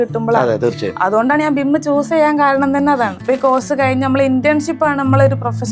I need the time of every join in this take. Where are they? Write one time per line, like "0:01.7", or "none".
0:03.2